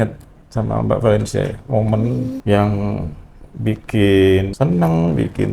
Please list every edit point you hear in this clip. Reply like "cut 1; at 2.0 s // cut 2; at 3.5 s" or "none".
cut 1; at 2.4 s // cut 2; at 4.5 s